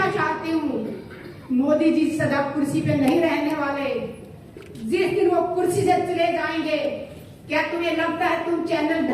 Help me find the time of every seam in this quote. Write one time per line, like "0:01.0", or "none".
none